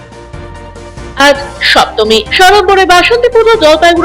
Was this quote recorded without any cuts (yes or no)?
no